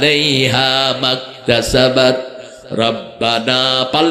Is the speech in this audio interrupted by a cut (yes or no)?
no